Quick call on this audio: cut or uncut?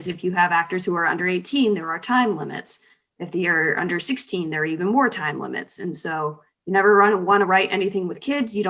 uncut